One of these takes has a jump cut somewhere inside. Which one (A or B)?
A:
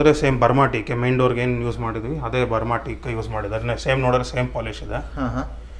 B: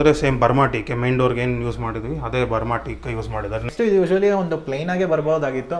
B